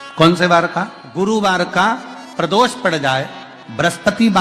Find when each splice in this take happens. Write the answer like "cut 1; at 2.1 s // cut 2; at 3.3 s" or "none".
cut 1; at 1.2 s